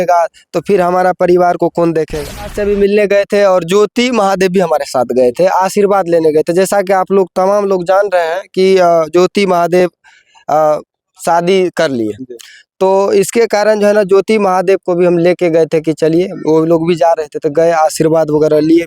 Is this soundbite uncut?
no; 1 cut; at 2.6 s

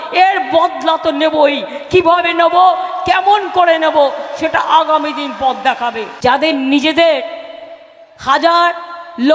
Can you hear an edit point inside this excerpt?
yes; 1 cut; at 6.1 s

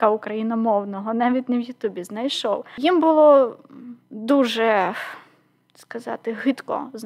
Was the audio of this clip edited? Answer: yes; 1 cut; at 2.7 s

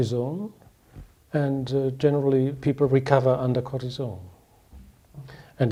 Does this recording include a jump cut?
no; 0 cuts

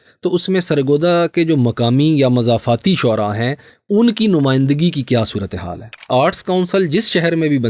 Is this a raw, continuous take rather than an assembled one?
no; 1 cut; at 6.1 s

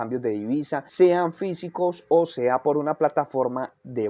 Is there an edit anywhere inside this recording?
no; 0 cuts

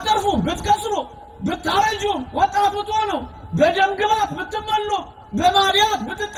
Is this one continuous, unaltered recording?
yes; 0 cuts

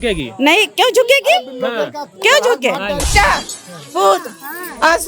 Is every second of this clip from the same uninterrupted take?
no; 1 cut; at 3.1 s

